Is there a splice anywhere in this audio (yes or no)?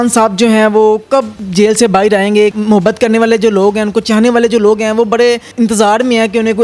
yes